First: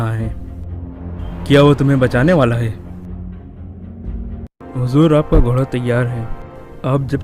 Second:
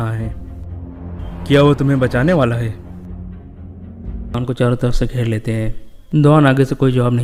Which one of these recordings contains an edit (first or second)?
first